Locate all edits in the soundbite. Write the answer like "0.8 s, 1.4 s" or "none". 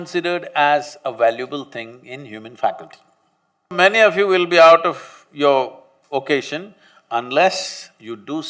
3.7 s